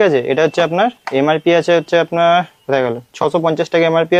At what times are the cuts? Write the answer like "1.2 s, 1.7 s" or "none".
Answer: none